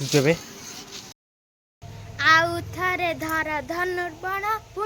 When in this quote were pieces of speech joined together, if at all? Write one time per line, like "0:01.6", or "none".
0:01.2